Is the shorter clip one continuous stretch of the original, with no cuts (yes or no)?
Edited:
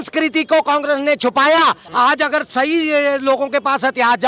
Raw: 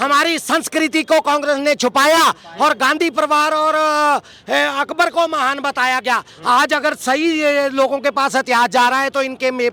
no